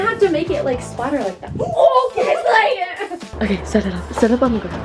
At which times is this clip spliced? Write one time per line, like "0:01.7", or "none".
0:03.2